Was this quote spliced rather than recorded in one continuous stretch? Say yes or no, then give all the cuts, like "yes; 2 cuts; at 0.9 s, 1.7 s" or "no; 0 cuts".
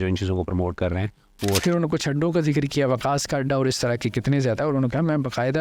yes; 1 cut; at 1.6 s